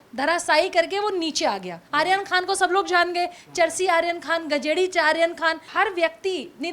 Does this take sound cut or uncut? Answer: cut